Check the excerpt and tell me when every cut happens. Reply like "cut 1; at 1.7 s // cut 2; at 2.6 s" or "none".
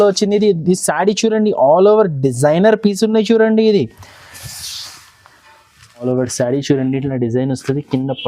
cut 1; at 6.0 s